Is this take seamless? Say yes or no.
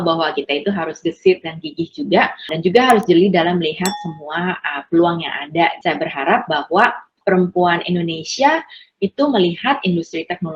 no